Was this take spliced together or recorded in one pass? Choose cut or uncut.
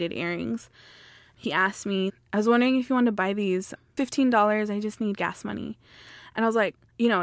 uncut